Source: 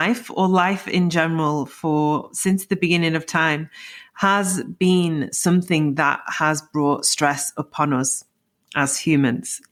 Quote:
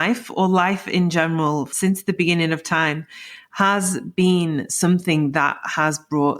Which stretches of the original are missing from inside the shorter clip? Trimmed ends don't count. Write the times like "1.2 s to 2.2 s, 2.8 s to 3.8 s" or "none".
1.7 s to 2.3 s